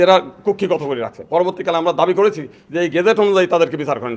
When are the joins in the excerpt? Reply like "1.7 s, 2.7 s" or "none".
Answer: none